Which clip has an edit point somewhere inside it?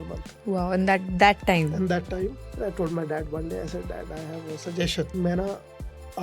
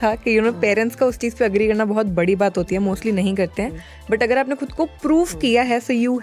first; 2 cuts; at 2.6 s, 5.1 s

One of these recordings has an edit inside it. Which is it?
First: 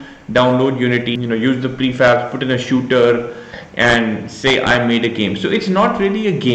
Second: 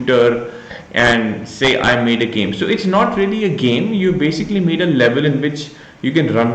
first; 1 cut; at 1.1 s

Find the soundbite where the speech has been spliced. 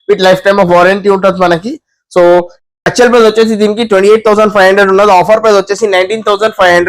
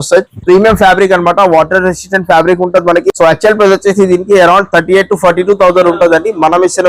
second; 1 cut; at 3.1 s

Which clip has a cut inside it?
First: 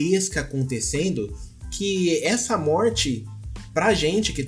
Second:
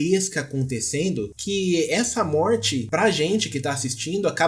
second; 2 cuts; at 1.4 s, 2.8 s

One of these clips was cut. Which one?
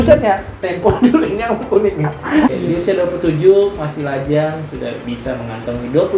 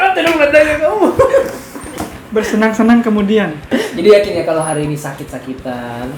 first; 1 cut; at 2.5 s

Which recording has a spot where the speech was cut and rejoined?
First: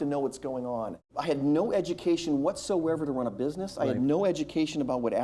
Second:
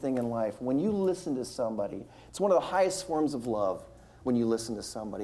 first; 1 cut; at 1.1 s

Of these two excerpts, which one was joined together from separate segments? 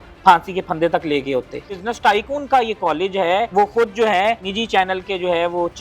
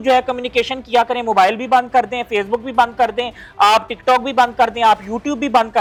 first; 3 cuts; at 1.7 s, 3.5 s, 4.5 s

